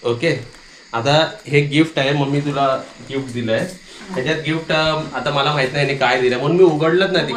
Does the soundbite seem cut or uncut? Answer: uncut